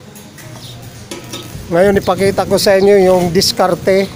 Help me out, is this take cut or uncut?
cut